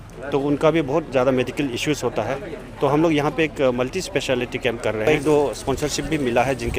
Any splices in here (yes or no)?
yes